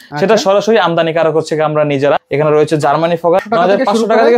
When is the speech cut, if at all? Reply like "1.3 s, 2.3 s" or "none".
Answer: 2.2 s, 3.4 s